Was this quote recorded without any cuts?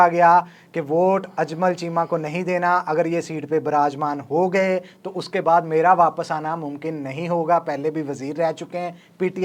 yes; 0 cuts

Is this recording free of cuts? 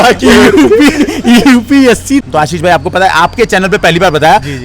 no; 1 cut; at 2.2 s

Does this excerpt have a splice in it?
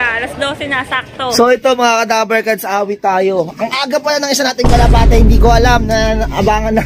yes; 1 cut; at 1.3 s

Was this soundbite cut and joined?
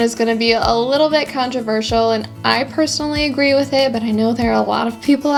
no; 0 cuts

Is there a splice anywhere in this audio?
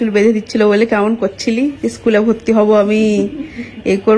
no; 0 cuts

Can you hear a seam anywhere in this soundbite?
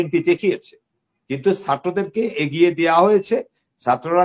no; 0 cuts

